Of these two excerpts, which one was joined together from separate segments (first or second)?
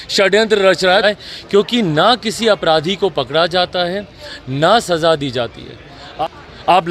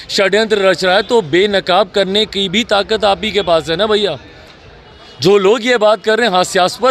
first